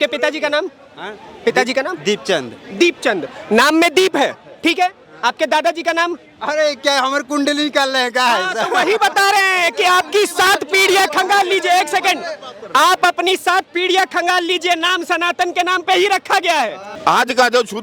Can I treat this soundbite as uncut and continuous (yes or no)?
no